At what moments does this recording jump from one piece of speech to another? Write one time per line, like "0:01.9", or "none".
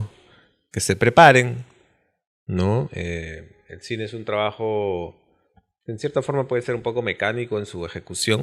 none